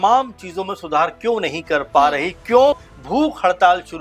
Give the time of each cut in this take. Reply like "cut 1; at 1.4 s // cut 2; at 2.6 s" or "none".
cut 1; at 2.9 s